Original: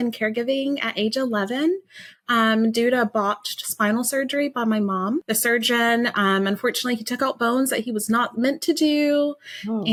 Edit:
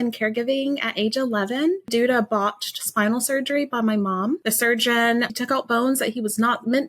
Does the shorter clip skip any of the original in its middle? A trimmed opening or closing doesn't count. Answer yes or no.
yes